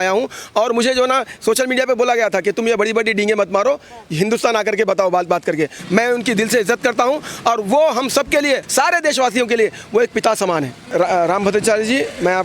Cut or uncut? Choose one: cut